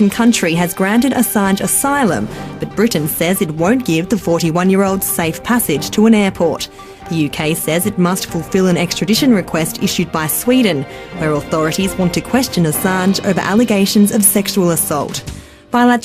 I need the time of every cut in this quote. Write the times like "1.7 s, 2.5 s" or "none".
7.8 s